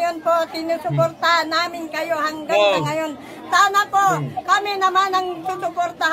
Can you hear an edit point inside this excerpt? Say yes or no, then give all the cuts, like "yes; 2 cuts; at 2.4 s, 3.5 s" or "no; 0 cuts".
no; 0 cuts